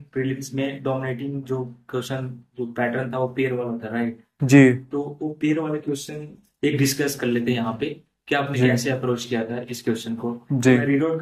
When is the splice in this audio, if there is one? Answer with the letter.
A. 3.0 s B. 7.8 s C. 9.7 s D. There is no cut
D